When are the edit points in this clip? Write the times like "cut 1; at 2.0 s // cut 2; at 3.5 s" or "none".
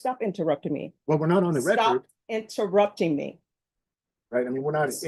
none